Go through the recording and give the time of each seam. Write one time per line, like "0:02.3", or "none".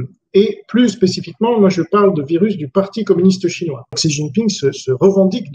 0:04.0